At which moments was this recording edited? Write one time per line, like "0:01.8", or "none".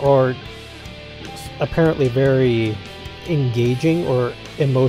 0:03.4